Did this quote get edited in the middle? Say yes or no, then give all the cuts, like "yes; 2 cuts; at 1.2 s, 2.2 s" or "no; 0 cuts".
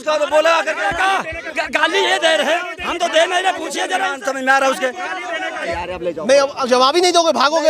yes; 1 cut; at 5.7 s